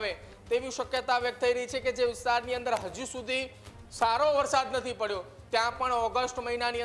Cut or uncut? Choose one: uncut